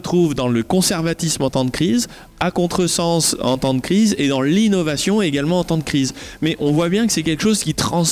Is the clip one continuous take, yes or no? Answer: yes